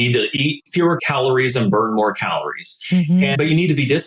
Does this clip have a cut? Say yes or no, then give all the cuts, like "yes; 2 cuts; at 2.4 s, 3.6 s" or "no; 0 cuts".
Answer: yes; 2 cuts; at 1.0 s, 3.3 s